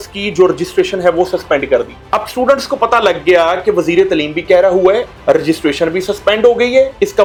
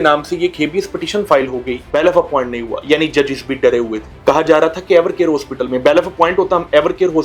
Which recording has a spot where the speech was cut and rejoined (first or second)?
second